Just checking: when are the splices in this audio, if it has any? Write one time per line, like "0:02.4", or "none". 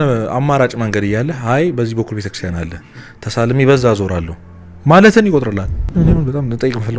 0:05.9